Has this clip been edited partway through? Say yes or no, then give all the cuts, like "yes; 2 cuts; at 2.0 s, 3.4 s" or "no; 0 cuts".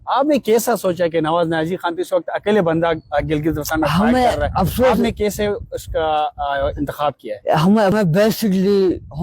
yes; 1 cut; at 7.9 s